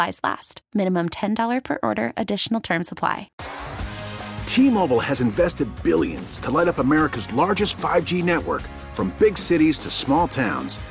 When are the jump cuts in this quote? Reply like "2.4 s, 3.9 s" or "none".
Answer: 3.3 s